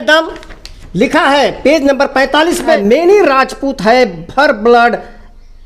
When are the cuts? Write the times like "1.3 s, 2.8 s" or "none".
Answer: 2.8 s